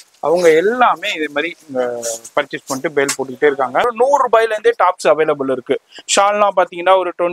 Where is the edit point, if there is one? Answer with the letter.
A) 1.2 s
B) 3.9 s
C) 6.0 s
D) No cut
B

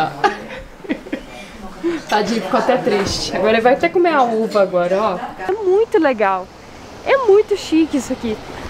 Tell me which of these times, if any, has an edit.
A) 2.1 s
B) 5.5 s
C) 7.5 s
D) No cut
B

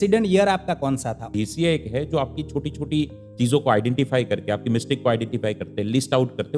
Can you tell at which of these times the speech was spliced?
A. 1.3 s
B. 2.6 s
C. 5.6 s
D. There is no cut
A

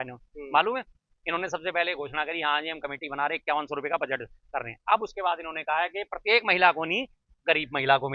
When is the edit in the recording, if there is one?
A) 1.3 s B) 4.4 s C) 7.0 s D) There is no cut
D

